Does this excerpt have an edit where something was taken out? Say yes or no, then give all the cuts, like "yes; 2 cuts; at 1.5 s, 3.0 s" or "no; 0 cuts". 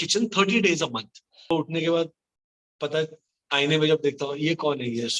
yes; 1 cut; at 1.4 s